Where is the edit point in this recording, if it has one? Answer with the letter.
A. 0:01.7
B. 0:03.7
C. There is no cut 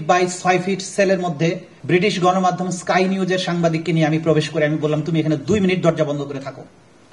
A